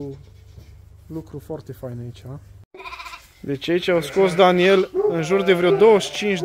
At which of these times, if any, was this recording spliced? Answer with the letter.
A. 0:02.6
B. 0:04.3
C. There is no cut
A